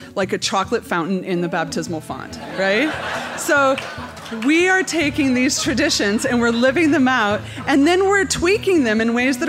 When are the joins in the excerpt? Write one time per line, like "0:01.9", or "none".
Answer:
none